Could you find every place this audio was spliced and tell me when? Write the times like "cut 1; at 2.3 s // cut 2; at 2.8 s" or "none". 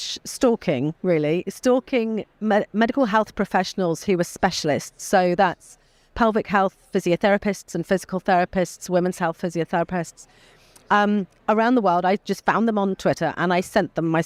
none